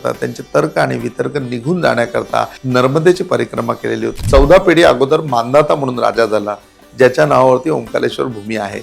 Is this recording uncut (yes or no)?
no